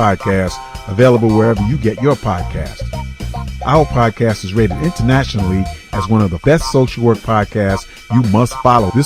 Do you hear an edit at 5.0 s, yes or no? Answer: no